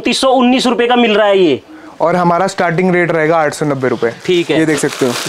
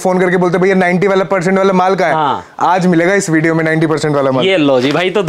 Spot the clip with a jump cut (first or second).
first